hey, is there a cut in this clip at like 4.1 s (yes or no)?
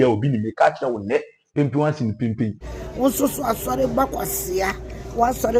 no